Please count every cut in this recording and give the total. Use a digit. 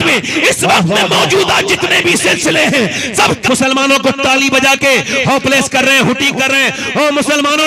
1